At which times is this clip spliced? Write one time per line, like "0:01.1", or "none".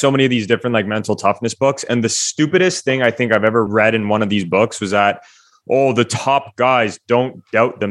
0:03.7

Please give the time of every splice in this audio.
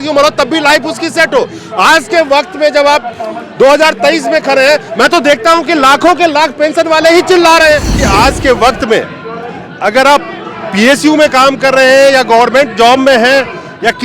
0:08.0

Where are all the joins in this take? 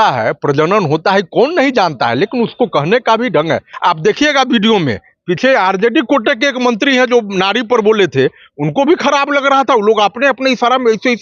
0:03.7

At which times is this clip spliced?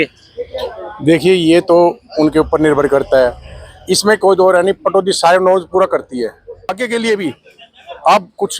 0:06.7

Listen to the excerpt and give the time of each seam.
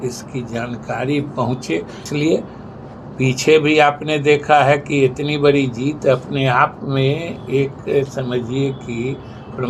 0:02.1

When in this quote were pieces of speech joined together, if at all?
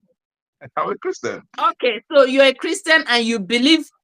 0:01.7

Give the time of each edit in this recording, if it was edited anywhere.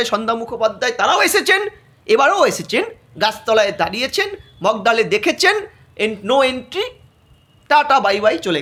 none

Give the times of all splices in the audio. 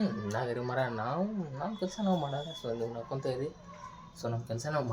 none

